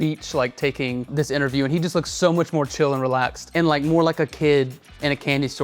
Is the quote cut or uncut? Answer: cut